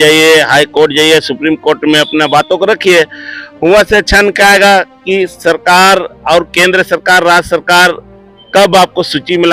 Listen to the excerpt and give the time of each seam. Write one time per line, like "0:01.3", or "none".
none